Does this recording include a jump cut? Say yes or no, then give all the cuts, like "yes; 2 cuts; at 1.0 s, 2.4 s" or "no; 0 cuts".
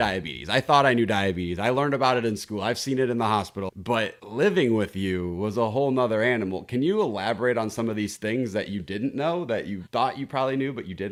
no; 0 cuts